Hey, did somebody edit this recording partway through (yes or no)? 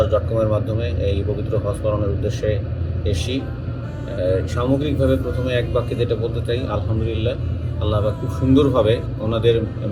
no